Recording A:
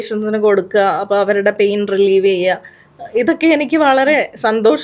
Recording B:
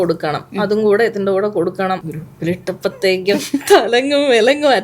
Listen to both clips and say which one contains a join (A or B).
B